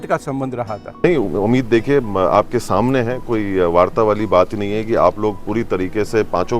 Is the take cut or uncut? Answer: cut